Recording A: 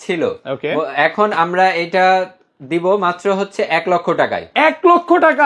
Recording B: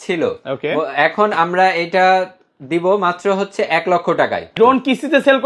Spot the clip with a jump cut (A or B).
B